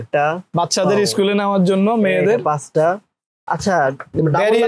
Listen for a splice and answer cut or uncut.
uncut